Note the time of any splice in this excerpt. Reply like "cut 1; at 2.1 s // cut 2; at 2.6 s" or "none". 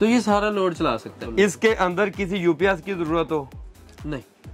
cut 1; at 1.2 s